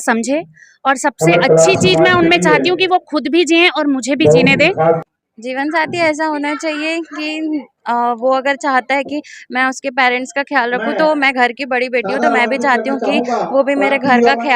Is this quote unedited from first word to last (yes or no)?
no